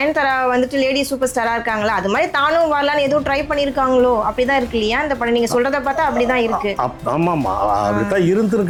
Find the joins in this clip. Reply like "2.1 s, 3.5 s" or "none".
none